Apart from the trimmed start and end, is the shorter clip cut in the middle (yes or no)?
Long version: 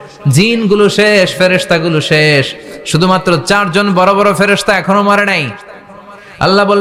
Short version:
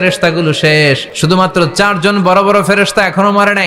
yes